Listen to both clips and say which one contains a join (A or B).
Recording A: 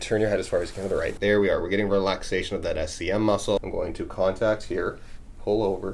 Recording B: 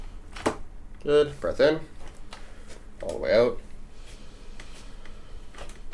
A